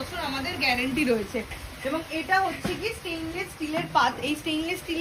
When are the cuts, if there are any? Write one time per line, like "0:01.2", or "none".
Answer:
none